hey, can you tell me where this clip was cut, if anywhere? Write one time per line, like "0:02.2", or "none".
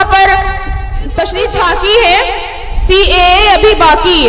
0:01.5